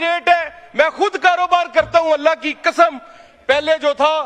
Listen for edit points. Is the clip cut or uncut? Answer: uncut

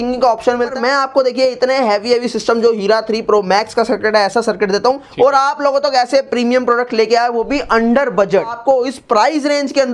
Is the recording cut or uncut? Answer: cut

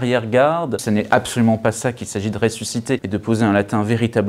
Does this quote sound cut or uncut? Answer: cut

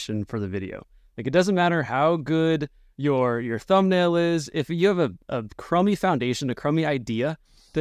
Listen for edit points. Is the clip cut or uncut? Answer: uncut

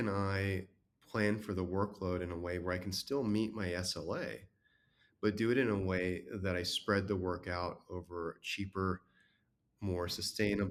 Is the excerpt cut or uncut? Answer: uncut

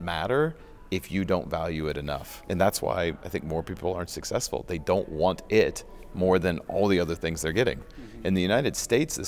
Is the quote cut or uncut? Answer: uncut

